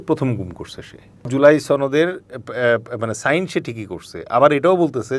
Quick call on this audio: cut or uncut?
cut